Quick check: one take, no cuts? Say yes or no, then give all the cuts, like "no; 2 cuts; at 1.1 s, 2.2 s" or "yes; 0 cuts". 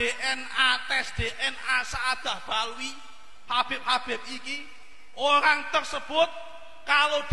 yes; 0 cuts